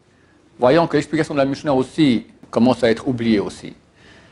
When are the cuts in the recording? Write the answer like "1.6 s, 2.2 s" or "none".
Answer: 2.4 s